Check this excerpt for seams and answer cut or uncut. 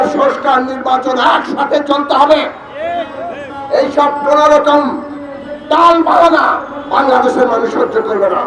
uncut